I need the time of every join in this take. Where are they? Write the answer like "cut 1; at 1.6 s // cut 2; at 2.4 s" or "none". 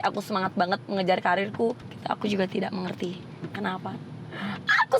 cut 1; at 1.9 s